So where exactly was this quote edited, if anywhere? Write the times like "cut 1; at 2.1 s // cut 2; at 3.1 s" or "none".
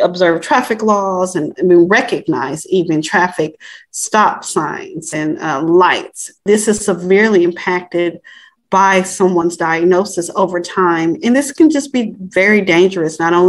none